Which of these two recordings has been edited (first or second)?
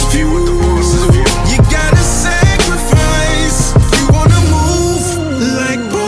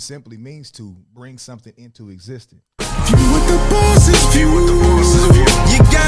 second